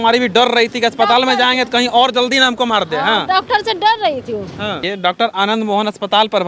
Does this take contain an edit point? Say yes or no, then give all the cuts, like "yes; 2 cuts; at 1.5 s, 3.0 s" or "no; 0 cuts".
yes; 1 cut; at 4.9 s